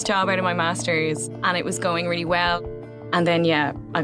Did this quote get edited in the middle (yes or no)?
yes